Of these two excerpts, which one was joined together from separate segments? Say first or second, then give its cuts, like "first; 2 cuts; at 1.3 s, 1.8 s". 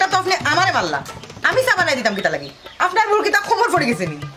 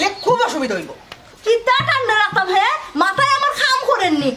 second; 1 cut; at 1.3 s